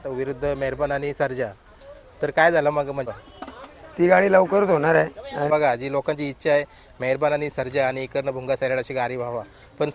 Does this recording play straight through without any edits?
no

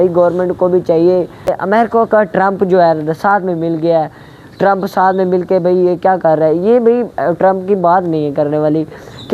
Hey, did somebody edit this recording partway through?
yes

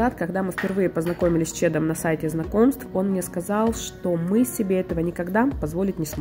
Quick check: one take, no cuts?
yes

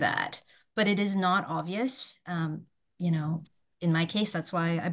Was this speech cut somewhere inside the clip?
no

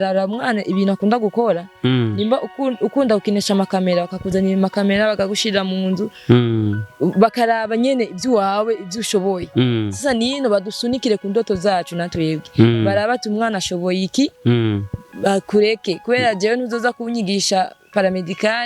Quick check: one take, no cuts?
yes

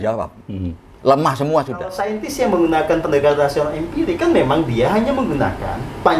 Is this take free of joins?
no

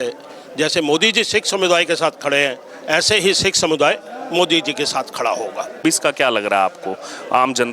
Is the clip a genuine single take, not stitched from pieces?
no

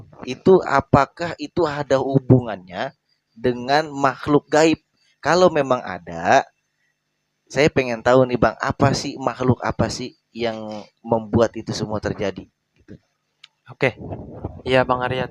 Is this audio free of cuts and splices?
yes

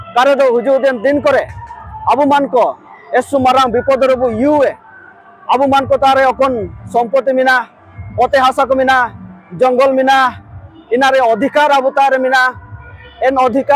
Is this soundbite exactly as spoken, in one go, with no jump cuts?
yes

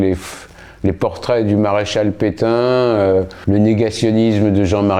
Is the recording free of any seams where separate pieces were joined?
no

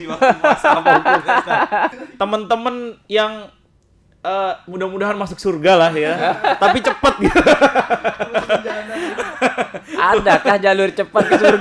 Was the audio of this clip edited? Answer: yes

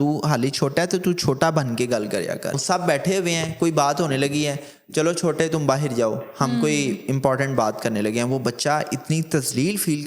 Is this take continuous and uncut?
no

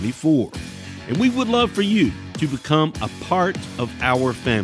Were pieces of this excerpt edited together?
yes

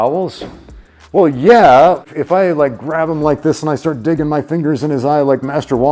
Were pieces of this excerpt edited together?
yes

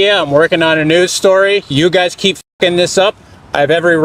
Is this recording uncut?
yes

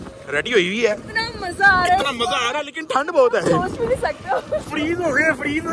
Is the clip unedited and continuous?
yes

